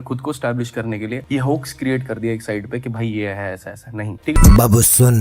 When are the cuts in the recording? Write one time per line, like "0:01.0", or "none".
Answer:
0:01.2
0:04.4